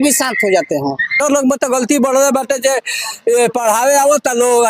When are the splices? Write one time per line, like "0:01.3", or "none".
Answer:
0:01.2